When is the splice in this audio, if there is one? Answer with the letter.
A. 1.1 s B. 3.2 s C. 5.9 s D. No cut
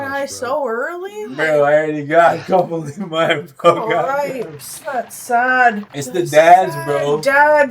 C